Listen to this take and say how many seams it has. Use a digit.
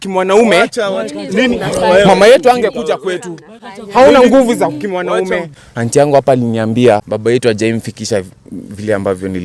2